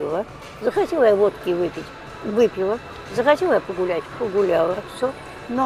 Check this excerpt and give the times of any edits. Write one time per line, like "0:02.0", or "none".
none